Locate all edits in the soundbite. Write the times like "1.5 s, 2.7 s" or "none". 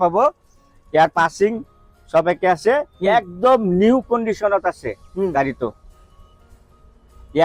none